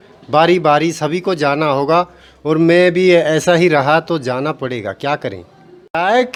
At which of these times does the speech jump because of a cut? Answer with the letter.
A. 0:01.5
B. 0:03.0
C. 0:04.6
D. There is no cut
D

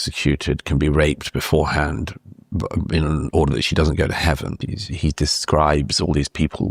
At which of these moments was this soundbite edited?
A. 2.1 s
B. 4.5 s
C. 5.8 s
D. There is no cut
B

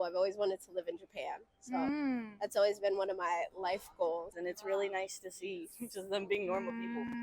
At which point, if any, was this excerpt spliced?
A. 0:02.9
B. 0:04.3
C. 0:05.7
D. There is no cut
B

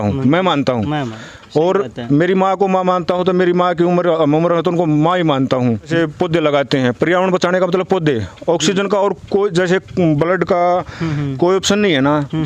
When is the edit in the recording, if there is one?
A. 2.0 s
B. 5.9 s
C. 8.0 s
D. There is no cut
B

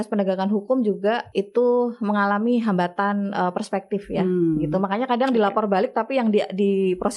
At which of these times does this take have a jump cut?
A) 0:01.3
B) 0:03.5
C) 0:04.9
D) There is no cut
A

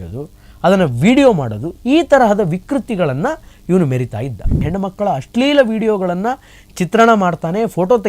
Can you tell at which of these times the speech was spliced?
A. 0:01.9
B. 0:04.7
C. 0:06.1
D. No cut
B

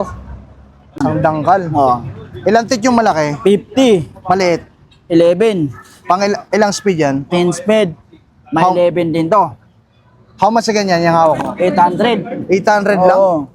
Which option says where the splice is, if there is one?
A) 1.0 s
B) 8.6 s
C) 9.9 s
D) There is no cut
A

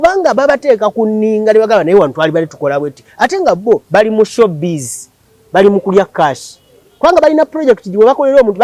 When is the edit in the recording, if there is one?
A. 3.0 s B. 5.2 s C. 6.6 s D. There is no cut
D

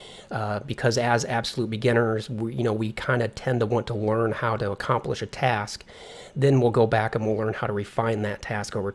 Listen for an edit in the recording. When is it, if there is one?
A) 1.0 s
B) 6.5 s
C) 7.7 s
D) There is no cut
B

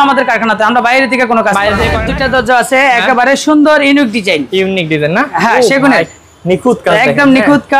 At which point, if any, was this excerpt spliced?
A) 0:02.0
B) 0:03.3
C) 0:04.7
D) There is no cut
A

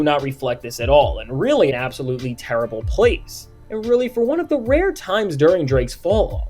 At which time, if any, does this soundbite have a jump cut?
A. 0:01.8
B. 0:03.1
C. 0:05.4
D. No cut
A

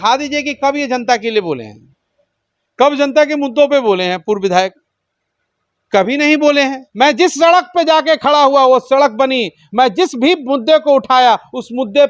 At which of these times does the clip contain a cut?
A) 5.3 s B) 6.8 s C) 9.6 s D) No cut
B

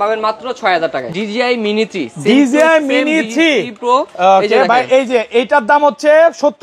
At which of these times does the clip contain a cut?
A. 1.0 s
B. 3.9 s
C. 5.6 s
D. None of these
A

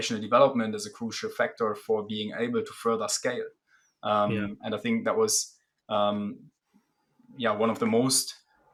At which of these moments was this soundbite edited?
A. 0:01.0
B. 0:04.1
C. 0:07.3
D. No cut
D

